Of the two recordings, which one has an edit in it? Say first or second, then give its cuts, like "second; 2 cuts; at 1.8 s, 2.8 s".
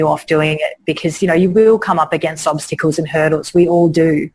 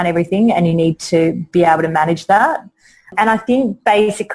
second; 1 cut; at 3.1 s